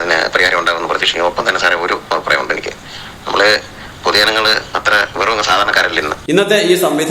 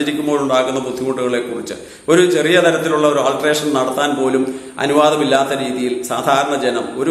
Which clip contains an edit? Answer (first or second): first